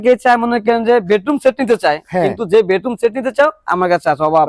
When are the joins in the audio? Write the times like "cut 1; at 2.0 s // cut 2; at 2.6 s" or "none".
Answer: none